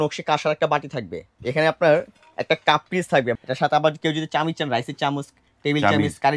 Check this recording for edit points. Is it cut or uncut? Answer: cut